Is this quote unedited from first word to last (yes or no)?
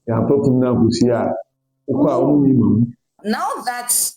no